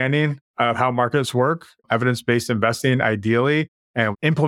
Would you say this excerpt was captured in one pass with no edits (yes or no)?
yes